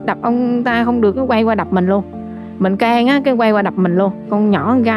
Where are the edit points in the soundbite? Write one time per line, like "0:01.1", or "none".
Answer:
none